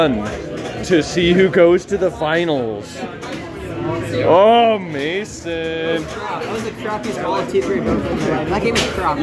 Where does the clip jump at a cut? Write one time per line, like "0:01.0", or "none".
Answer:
none